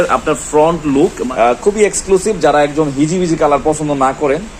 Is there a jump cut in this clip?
yes; 1 cut; at 1.2 s

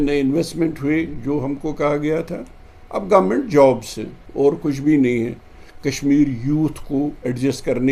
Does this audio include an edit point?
no; 0 cuts

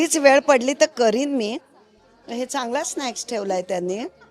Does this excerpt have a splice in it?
no; 0 cuts

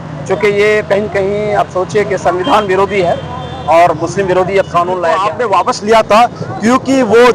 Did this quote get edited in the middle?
yes; 1 cut; at 5.2 s

